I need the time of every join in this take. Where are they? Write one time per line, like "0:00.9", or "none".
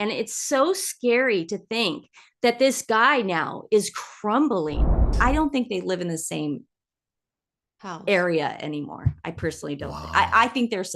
0:05.1